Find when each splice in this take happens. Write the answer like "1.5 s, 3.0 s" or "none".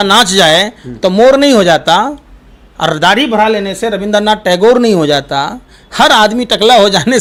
none